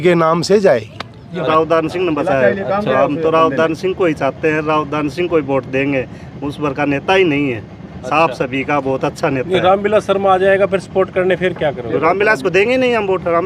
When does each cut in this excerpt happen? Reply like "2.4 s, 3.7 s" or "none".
1.5 s

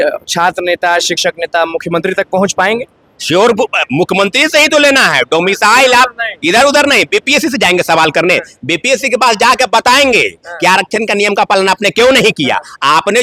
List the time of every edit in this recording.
none

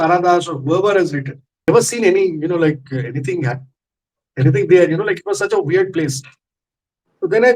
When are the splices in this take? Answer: 1.7 s

